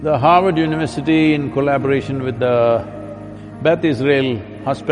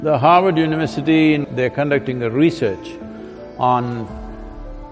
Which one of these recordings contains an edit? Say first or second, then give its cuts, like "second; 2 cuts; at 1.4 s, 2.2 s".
second; 1 cut; at 1.5 s